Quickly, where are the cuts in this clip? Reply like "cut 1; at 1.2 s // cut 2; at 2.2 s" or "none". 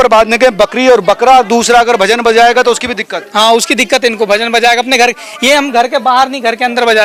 none